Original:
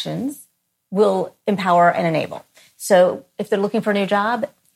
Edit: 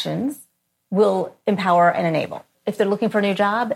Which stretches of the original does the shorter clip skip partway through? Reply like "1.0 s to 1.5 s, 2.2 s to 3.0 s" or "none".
2.6 s to 3.3 s